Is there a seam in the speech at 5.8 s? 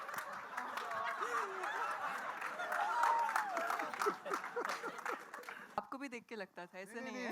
yes; 1 cut; at 5.8 s

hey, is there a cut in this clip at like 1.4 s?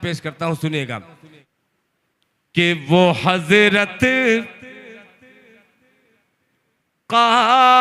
yes; 1 cut; at 1.4 s

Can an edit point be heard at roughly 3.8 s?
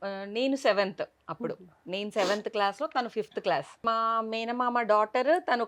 yes; 1 cut; at 3.8 s

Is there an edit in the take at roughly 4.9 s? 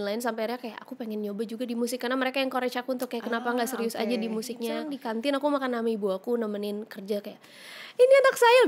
yes; 1 cut; at 4.9 s

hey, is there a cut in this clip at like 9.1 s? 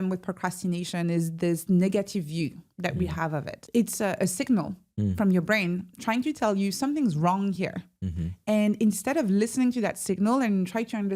no; 1 cut; at 3.6 s

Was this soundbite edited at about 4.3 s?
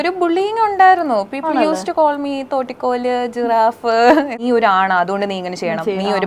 yes; 1 cut; at 4.3 s

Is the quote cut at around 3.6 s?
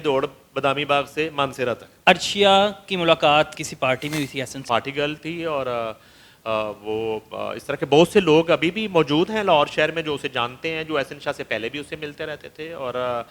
yes; 3 cuts; at 1.9 s, 3.6 s, 4.6 s

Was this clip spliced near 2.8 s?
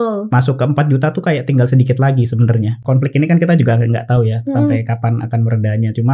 yes; 1 cut; at 2.8 s

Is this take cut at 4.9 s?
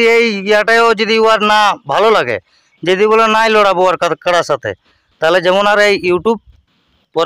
no; 0 cuts

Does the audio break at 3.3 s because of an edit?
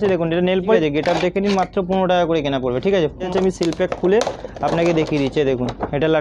yes; 2 cuts; at 0.8 s, 3.3 s

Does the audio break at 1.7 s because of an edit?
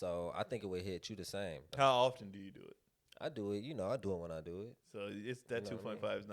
yes; 2 cuts; at 1.7 s, 4.8 s

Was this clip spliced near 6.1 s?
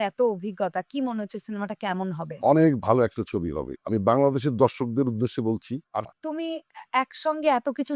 yes; 1 cut; at 6.1 s

